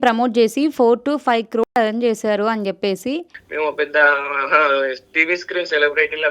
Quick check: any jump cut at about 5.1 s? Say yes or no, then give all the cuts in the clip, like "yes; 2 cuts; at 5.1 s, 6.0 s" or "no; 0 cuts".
no; 1 cut; at 3.4 s